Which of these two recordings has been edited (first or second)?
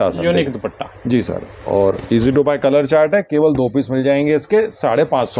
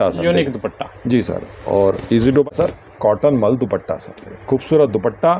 second